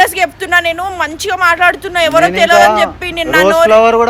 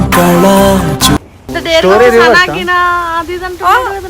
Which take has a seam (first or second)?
second